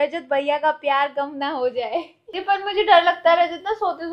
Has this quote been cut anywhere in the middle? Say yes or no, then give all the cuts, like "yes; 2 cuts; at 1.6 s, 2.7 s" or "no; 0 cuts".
yes; 1 cut; at 2.3 s